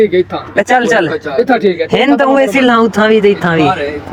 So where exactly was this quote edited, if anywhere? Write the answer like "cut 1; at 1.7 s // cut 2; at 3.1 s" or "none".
none